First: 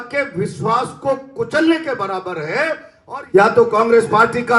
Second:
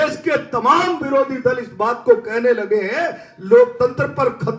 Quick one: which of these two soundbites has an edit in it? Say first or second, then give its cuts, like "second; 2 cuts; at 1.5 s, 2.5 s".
first; 1 cut; at 2.9 s